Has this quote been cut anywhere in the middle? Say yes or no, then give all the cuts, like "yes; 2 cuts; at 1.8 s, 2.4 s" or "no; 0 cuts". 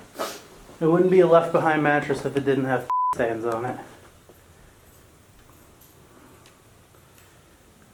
no; 0 cuts